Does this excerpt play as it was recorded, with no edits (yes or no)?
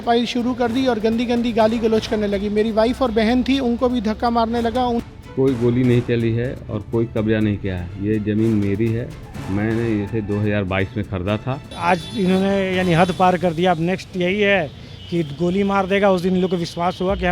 no